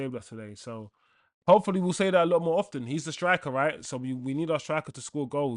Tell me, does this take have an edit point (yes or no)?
no